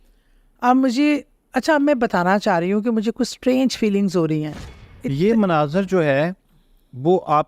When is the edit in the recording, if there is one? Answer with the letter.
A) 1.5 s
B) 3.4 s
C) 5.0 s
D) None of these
C